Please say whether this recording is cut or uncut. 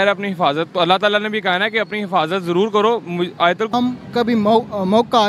cut